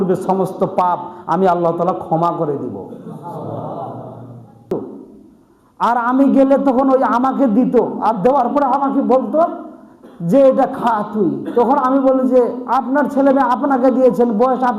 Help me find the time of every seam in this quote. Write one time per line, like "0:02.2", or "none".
0:04.7